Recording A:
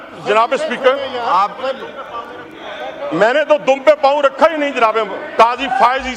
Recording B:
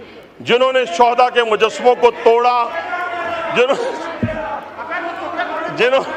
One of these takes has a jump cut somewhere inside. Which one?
A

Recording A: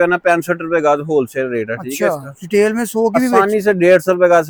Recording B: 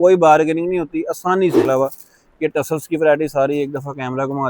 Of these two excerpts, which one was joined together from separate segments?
B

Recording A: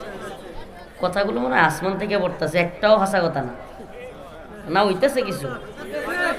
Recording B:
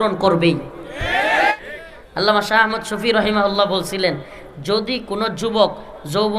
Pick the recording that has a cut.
B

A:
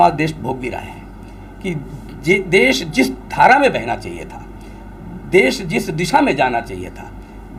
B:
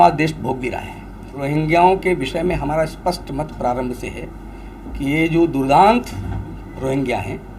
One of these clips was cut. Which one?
B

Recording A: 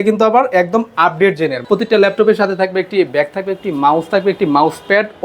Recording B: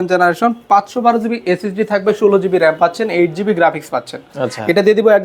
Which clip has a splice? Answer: A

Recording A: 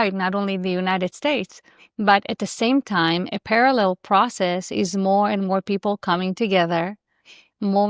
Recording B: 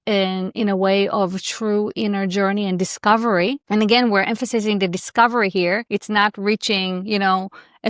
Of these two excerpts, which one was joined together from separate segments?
B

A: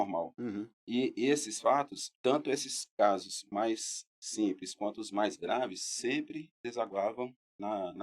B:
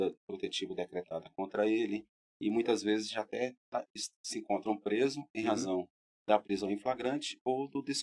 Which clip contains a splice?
A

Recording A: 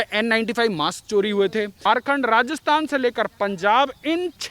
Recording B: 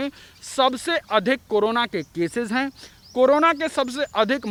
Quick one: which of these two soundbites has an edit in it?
A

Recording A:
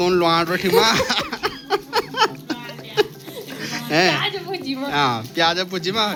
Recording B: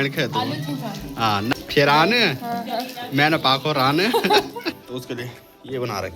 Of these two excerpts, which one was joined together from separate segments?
B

